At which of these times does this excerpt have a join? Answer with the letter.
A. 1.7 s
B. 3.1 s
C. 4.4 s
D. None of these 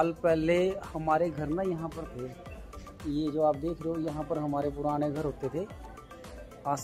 D